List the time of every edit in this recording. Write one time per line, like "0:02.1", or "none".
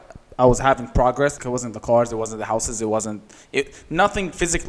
0:01.4